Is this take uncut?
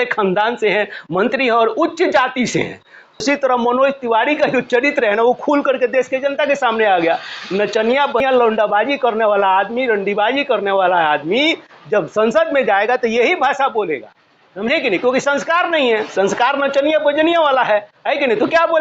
no; 2 cuts; at 3.2 s, 8.2 s

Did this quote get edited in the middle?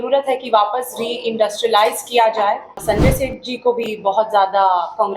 yes; 1 cut; at 2.8 s

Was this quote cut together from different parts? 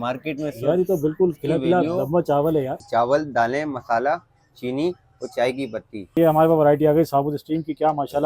yes; 2 cuts; at 2.8 s, 6.2 s

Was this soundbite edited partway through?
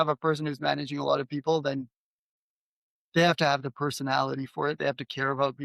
no; 0 cuts

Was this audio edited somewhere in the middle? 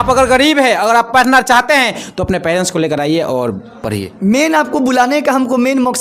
no; 0 cuts

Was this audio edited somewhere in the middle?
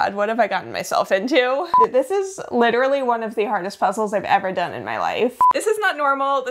yes; 2 cuts; at 1.7 s, 5.4 s

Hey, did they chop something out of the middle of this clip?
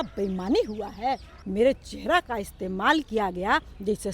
yes; 1 cut; at 1.3 s

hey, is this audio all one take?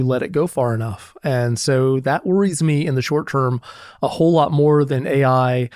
yes; 0 cuts

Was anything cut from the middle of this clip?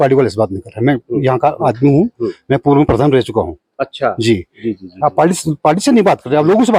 no; 0 cuts

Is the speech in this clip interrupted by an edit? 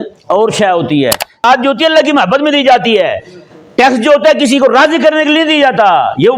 yes; 1 cut; at 1.4 s

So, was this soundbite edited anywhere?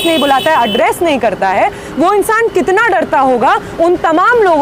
no; 0 cuts

